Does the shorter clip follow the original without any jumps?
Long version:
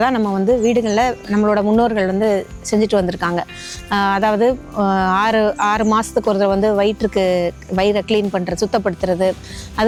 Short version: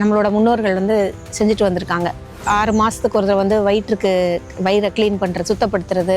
no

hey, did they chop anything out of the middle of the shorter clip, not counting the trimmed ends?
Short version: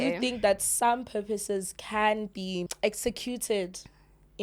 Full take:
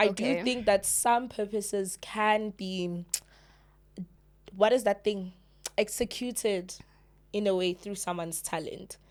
yes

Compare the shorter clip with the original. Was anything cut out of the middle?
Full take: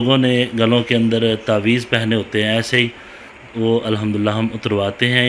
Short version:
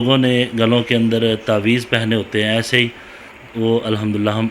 no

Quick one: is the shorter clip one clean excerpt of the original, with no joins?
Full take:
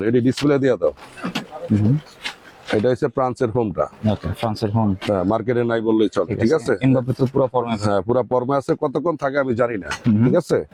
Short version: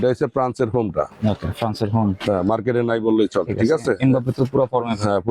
yes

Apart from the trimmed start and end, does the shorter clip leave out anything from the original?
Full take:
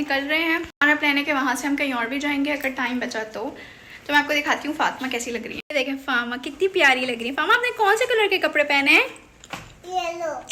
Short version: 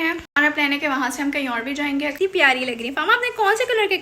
yes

